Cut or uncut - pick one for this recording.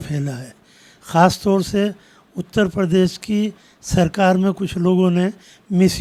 uncut